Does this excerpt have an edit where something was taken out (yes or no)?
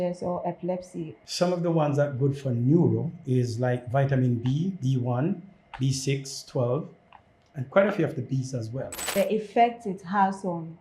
yes